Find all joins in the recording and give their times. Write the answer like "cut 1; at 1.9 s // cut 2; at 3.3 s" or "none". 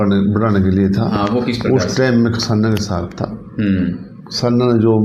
none